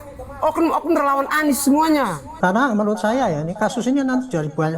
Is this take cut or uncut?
cut